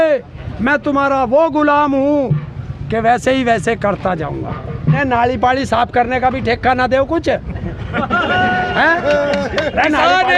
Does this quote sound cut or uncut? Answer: cut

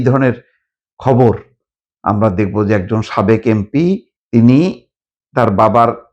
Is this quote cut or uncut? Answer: cut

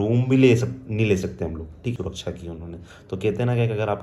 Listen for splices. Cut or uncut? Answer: cut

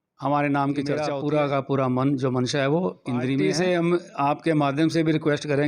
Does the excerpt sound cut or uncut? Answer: cut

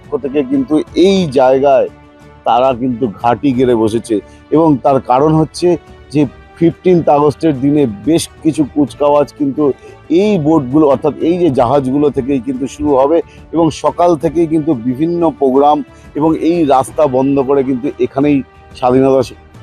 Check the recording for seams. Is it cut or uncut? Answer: uncut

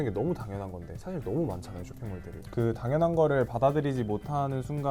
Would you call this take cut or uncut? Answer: uncut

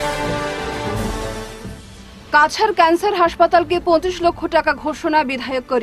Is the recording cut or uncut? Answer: uncut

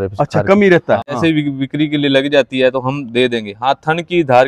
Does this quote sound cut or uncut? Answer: cut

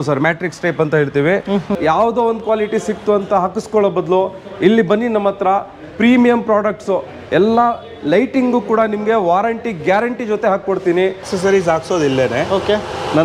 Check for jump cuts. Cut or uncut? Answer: cut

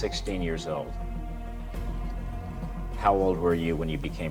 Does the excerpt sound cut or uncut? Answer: uncut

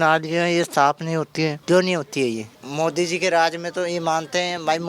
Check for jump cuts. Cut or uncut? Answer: cut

